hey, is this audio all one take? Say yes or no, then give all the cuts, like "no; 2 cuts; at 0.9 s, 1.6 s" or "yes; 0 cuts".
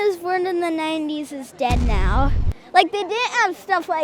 no; 1 cut; at 2.5 s